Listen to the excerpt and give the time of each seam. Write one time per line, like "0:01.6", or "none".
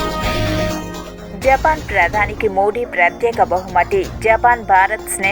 none